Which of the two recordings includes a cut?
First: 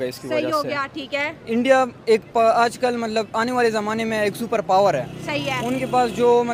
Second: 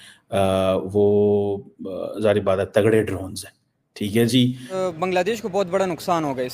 second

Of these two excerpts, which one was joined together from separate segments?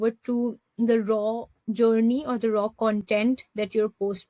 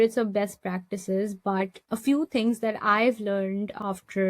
second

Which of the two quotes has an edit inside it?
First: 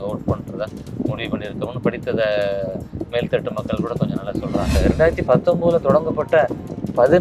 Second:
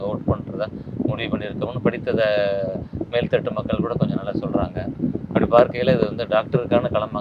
first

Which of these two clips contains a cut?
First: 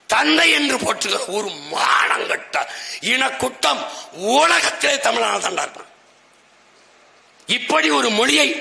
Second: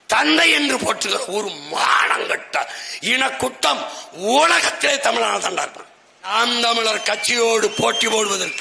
second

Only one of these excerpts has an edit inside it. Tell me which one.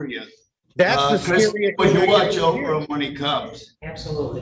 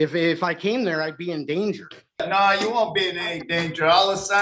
second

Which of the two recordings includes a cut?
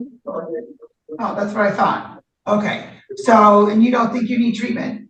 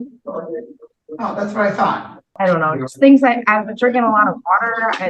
second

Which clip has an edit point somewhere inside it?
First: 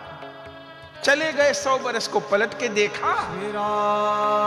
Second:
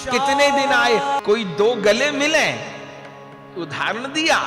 second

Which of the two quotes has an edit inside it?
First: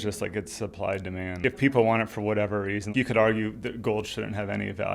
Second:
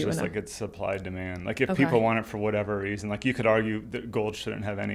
first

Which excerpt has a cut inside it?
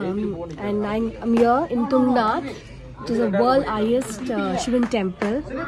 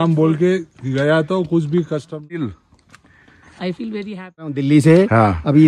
second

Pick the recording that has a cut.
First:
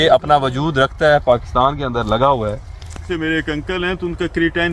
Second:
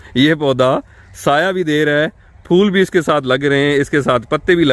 first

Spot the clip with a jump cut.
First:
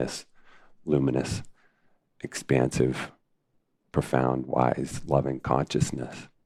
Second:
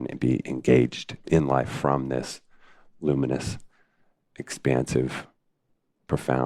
second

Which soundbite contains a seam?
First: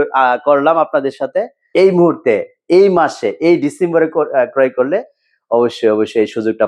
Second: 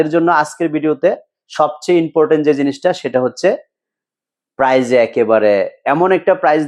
first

